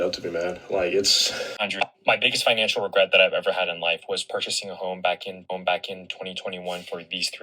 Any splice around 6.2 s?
no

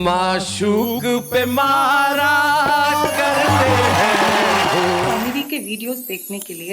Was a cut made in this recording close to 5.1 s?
yes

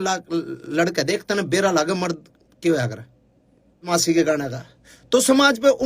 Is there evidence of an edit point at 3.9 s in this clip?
yes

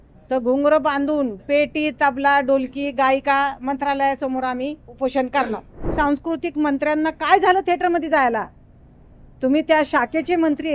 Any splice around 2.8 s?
no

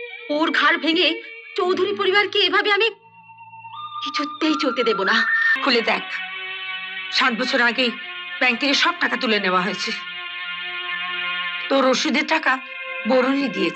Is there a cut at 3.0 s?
no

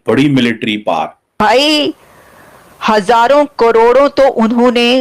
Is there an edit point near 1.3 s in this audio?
yes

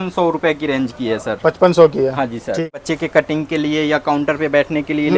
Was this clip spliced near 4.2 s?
no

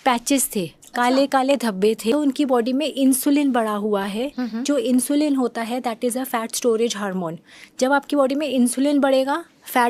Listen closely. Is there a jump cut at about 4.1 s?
no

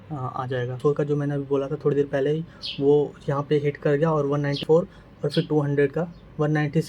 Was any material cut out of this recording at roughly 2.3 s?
no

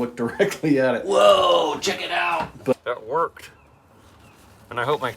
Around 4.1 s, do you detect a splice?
no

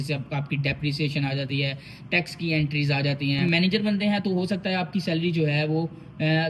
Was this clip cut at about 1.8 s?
no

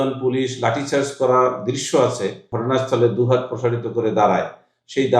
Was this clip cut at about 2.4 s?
yes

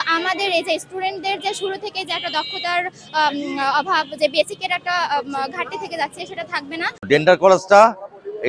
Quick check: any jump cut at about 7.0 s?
yes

